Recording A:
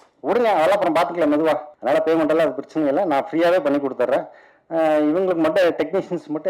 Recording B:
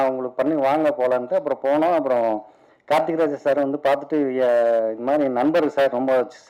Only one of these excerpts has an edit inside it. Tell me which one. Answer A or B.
A